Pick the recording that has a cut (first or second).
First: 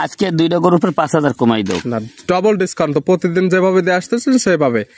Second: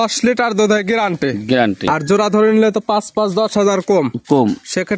second